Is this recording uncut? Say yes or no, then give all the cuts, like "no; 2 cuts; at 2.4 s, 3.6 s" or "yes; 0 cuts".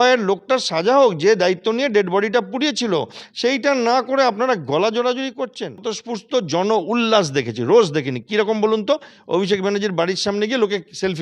no; 1 cut; at 5.9 s